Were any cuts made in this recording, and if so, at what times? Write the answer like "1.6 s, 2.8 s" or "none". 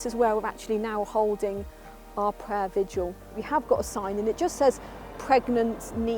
3.4 s